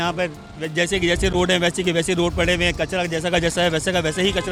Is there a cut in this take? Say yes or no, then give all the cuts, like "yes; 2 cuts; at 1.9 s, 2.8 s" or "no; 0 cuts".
no; 0 cuts